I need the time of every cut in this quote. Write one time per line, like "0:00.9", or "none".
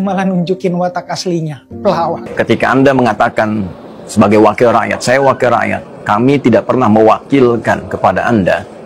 0:02.3